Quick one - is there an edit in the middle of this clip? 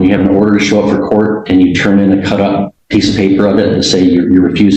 yes; 1 cut; at 2.8 s

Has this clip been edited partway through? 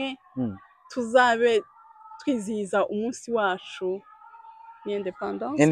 no; 0 cuts

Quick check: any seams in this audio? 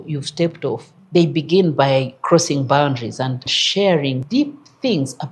yes; 3 cuts; at 0.9 s, 3.5 s, 4.2 s

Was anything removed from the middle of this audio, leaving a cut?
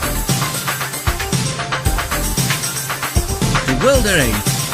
no; 0 cuts

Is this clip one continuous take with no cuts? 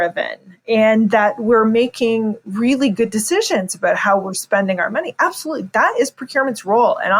yes; 0 cuts

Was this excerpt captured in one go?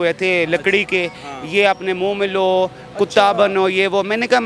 yes; 0 cuts

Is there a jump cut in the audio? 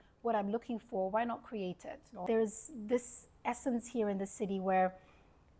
yes; 1 cut; at 2.2 s

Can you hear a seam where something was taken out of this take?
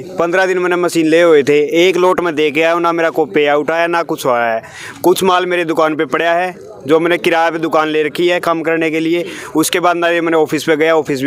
no; 0 cuts

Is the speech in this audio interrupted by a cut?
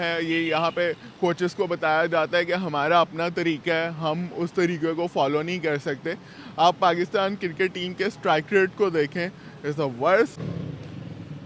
no; 0 cuts

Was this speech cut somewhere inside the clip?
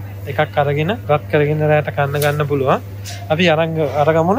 yes; 1 cut; at 1.0 s

